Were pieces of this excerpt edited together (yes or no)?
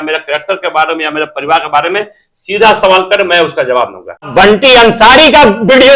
yes